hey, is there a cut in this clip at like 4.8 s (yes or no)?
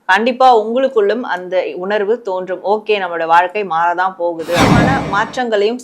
yes